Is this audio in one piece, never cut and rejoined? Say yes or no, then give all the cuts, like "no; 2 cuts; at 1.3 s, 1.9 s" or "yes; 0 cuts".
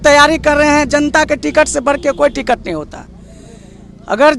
yes; 0 cuts